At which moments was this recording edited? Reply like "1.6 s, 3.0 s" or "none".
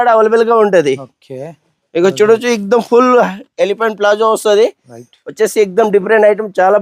none